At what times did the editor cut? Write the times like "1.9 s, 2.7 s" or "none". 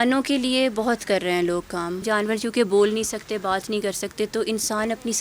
2.0 s